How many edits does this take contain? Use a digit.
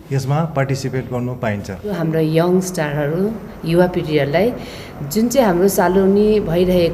1